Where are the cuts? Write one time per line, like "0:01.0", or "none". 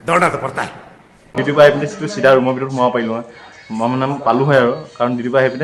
none